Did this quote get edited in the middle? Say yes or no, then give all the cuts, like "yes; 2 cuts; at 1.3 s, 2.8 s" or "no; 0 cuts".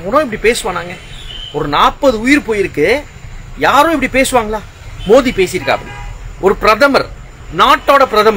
no; 0 cuts